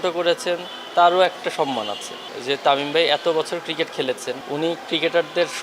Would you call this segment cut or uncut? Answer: cut